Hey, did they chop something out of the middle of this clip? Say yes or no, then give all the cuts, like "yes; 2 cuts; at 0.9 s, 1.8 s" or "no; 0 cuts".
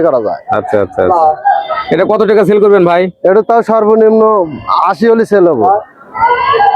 no; 0 cuts